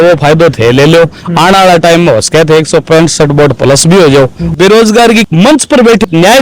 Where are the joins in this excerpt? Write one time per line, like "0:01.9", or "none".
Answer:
0:04.5